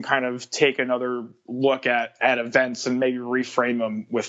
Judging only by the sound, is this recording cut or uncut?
cut